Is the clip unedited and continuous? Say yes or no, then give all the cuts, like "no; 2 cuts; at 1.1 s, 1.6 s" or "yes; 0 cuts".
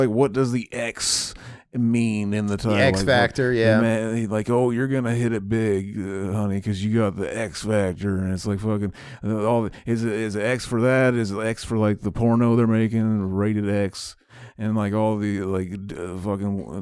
yes; 0 cuts